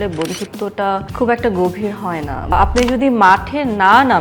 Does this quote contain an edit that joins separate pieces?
yes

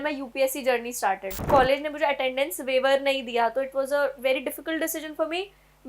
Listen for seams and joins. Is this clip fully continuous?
no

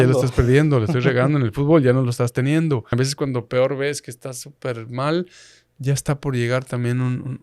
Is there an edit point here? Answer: yes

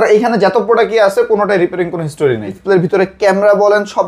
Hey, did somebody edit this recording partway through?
yes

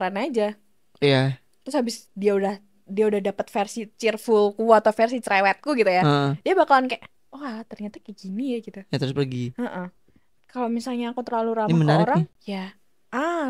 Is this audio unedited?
no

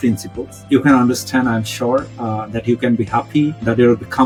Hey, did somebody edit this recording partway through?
no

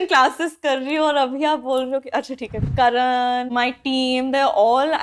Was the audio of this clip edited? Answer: yes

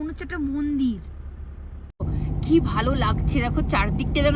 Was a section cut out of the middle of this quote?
yes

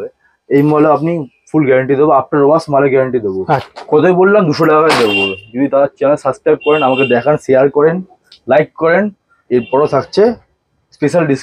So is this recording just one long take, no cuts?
no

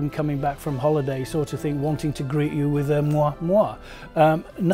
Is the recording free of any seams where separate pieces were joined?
yes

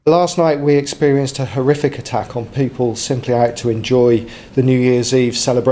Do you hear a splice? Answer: no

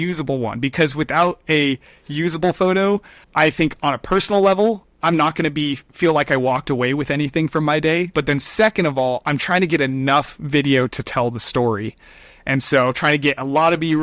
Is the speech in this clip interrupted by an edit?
yes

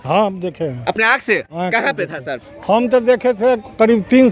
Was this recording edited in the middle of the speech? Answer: no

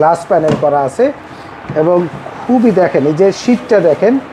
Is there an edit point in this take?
no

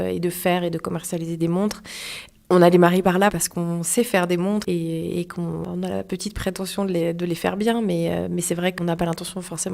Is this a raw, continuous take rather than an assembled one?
no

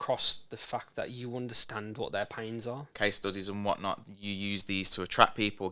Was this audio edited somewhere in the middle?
yes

